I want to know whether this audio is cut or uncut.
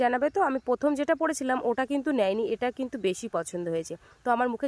uncut